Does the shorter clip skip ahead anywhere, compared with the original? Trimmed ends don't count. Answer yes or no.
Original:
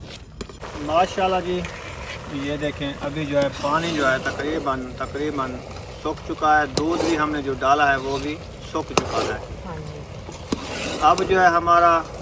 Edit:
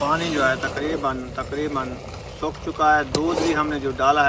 no